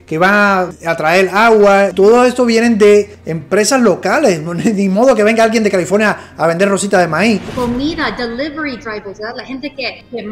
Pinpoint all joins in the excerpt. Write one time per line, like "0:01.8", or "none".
0:07.5